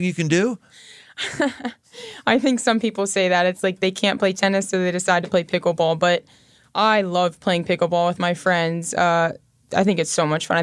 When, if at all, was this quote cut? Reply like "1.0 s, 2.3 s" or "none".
9.6 s